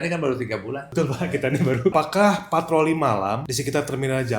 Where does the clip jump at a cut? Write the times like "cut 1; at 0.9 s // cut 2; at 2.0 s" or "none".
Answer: cut 1; at 0.9 s // cut 2; at 1.9 s // cut 3; at 3.5 s